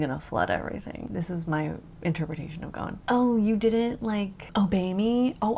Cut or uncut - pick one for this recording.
cut